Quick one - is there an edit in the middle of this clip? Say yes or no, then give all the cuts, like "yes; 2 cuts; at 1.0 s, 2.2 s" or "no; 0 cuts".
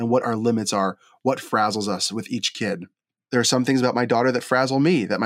yes; 1 cut; at 3.2 s